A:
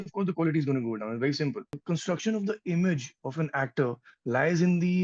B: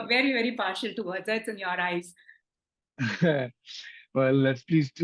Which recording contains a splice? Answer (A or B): A